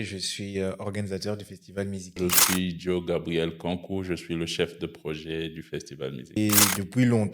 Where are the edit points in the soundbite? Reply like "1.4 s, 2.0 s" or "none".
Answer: 2.2 s, 6.4 s